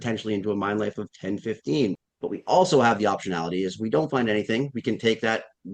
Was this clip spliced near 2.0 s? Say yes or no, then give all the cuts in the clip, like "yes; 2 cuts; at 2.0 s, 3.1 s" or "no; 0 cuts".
yes; 1 cut; at 2.0 s